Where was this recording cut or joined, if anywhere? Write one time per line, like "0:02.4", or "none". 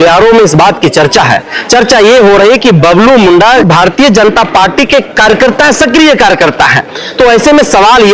none